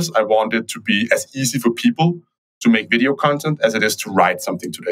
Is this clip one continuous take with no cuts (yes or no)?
yes